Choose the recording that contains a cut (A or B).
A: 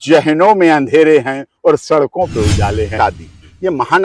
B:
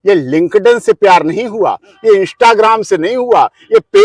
A